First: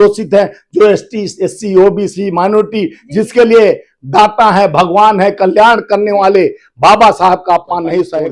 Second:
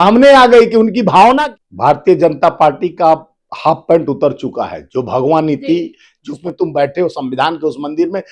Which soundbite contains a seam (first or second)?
second